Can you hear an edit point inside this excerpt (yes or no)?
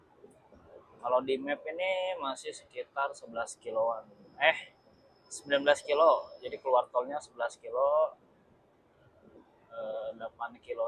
no